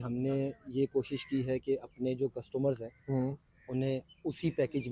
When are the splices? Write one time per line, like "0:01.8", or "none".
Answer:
none